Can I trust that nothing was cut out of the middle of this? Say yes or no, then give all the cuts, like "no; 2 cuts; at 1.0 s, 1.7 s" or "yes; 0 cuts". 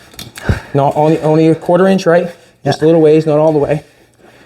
yes; 0 cuts